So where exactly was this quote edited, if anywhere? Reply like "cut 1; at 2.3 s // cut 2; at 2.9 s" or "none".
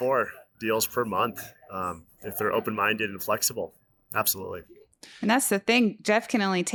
none